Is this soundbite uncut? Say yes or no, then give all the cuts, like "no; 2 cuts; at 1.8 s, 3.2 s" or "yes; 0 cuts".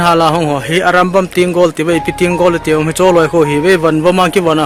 yes; 0 cuts